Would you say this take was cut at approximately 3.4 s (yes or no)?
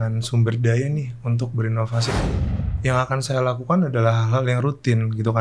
no